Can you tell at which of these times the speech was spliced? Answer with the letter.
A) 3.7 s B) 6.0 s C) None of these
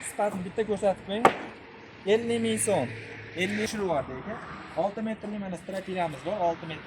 A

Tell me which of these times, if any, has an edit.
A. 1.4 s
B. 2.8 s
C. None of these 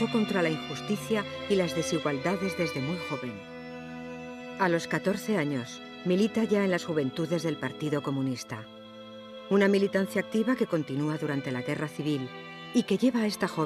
A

